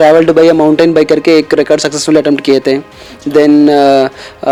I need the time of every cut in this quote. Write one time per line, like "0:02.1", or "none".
none